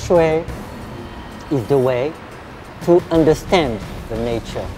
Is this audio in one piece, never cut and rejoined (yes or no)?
yes